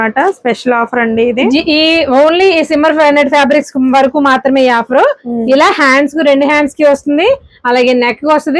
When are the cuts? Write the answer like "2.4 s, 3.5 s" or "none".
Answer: none